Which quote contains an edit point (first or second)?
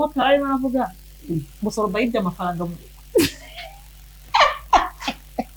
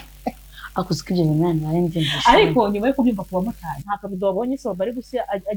second